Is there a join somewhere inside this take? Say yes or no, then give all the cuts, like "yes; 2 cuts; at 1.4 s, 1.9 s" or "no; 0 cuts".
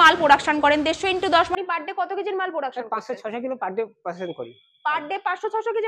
yes; 1 cut; at 1.5 s